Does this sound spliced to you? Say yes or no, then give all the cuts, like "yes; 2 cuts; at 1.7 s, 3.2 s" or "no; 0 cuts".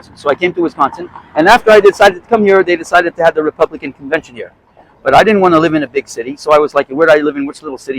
no; 0 cuts